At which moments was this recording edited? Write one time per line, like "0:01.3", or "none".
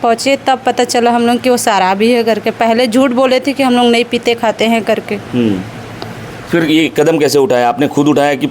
none